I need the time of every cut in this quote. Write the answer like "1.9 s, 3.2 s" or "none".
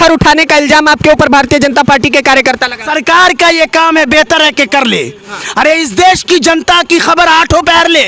2.9 s